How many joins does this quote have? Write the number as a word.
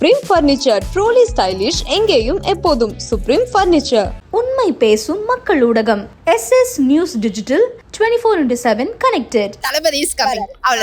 one